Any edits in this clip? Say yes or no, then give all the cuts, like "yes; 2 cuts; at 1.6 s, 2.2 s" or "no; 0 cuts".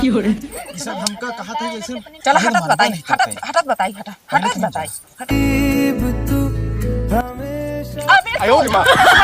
yes; 1 cut; at 5.3 s